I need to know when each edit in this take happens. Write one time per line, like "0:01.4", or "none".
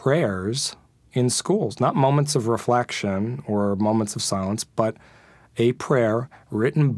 none